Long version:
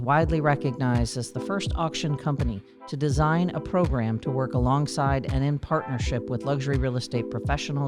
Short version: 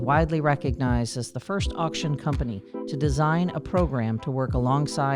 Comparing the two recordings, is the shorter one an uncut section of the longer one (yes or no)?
yes